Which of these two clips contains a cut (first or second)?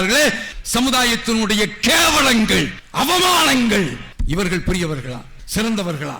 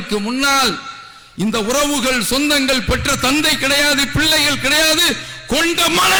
first